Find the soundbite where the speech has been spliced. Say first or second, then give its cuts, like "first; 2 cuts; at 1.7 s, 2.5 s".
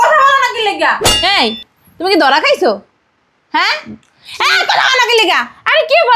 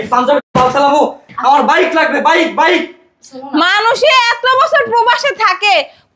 first; 1 cut; at 1.1 s